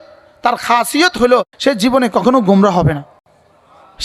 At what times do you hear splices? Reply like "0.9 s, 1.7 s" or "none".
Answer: 1.5 s